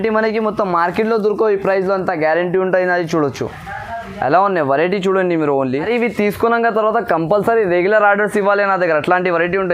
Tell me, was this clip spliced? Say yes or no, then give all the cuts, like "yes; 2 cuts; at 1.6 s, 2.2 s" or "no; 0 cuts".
yes; 1 cut; at 5.9 s